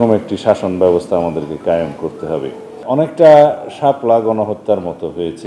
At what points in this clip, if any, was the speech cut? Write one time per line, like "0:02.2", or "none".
0:02.8